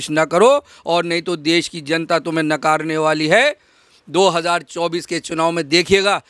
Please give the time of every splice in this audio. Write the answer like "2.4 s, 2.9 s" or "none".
none